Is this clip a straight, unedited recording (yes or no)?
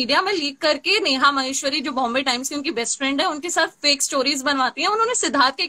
yes